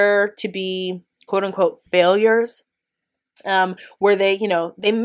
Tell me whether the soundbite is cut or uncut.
uncut